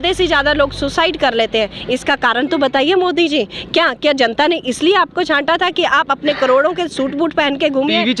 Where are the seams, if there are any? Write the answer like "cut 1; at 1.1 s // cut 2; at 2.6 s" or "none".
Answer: none